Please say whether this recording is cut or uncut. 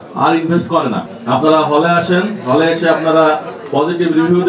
cut